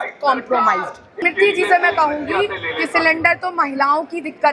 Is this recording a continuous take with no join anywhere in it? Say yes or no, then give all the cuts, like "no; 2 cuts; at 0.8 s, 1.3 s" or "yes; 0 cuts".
no; 1 cut; at 1.2 s